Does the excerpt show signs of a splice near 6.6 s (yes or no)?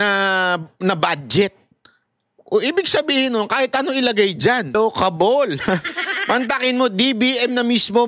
no